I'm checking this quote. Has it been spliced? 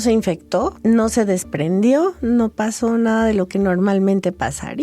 no; 0 cuts

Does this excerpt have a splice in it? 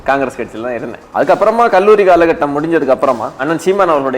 yes; 2 cuts; at 1.0 s, 3.4 s

